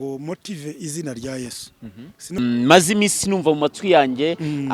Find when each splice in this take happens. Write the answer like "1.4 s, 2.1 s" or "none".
2.4 s